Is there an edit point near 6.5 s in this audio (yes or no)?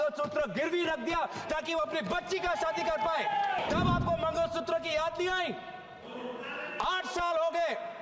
no